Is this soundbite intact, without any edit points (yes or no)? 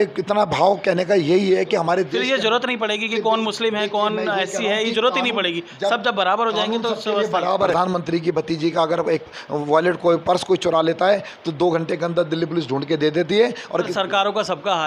no